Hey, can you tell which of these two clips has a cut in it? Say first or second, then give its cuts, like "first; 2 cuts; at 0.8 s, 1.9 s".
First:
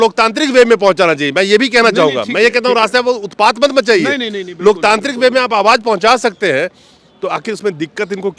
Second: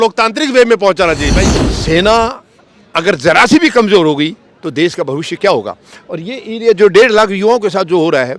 second; 1 cut; at 1.4 s